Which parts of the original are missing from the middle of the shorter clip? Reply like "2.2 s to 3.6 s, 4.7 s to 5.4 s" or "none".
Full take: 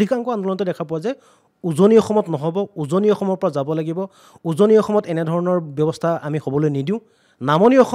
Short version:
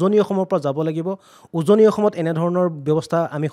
none

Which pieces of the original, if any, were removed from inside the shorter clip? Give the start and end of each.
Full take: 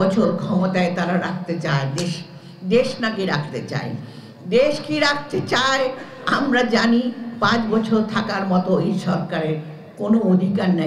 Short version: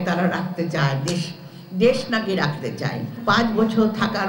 4.0 s to 7.3 s

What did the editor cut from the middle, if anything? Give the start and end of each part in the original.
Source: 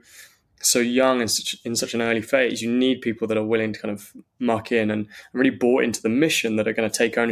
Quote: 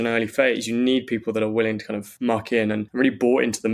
4.0 s to 4.2 s, 5.1 s to 5.3 s

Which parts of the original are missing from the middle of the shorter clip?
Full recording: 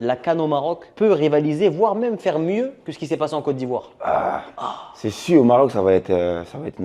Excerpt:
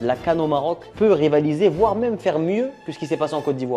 none

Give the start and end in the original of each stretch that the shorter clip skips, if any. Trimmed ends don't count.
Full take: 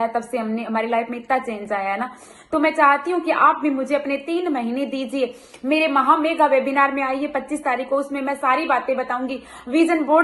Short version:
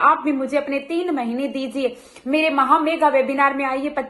none

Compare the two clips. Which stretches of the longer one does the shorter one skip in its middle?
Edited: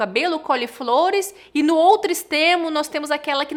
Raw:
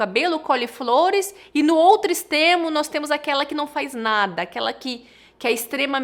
none

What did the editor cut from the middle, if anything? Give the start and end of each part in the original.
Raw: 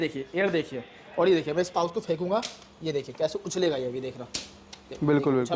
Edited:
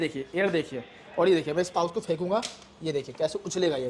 none

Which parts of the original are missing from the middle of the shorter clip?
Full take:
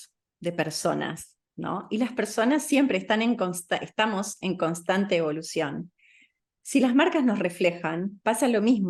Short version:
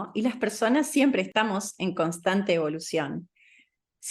3.0 s to 3.9 s

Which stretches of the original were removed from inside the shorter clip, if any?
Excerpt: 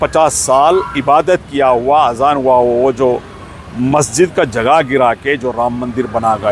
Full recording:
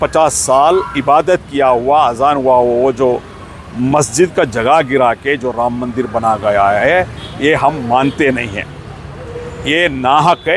none

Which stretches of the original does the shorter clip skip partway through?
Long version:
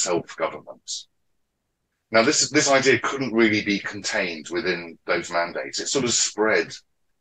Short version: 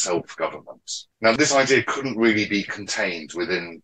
1.3 s to 2.4 s

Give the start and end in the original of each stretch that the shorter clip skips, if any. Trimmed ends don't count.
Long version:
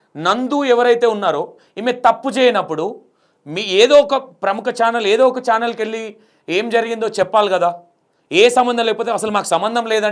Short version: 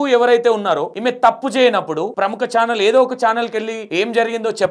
1.5 s to 1.7 s, 3.0 s to 4.4 s, 6.0 s to 6.4 s

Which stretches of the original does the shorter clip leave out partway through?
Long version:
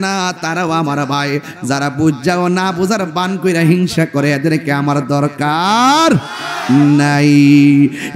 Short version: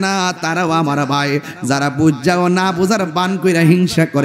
none

